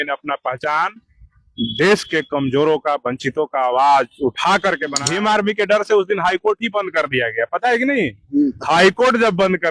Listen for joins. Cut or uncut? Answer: cut